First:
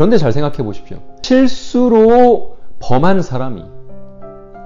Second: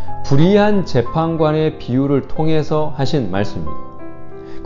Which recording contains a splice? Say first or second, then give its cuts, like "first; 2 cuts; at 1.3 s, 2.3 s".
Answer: first; 1 cut; at 1.2 s